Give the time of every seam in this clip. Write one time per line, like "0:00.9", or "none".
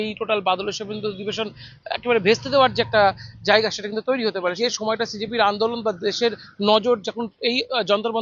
0:04.6